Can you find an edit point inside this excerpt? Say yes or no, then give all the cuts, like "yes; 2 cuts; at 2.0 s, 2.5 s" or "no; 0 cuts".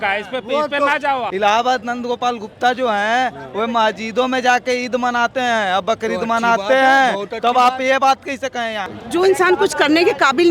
yes; 2 cuts; at 1.3 s, 8.8 s